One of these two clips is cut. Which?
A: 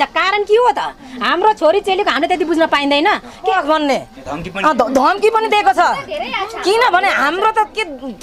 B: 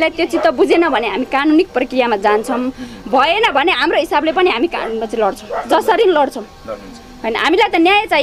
A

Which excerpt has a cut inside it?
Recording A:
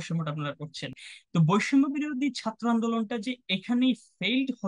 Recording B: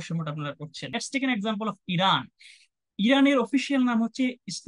B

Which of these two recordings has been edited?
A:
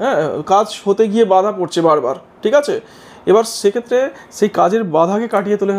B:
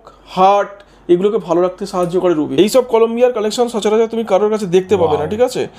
B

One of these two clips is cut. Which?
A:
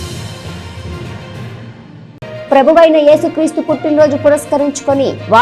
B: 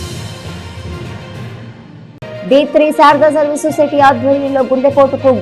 B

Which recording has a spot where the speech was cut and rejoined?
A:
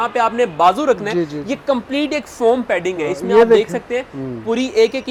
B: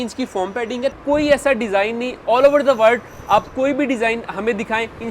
B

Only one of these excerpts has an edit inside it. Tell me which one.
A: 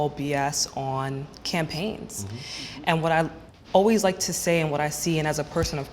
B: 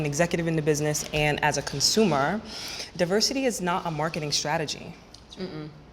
A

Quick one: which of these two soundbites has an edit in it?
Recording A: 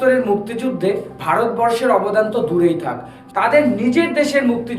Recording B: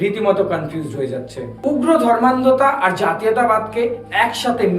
B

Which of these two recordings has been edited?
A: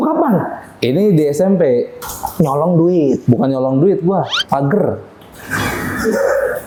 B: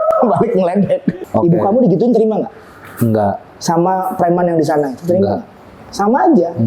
B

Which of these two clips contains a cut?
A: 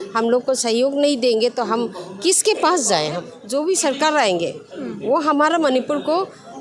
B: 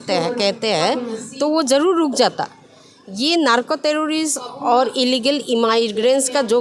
A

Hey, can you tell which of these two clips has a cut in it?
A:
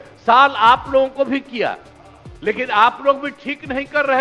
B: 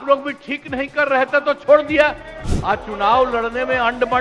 B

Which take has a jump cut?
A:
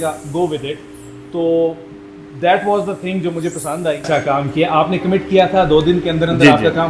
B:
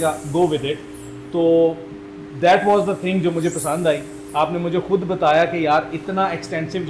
A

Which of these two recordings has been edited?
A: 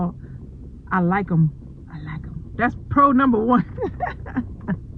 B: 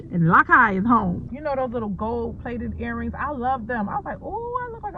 B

